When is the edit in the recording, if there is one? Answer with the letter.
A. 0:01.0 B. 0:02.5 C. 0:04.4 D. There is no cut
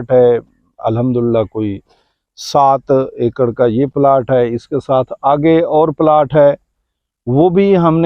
D